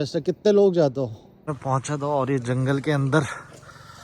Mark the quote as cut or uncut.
cut